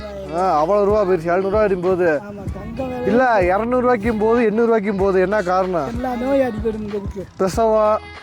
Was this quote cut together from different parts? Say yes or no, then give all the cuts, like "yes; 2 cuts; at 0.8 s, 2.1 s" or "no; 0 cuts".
yes; 1 cut; at 6.0 s